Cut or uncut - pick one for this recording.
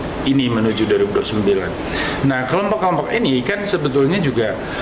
uncut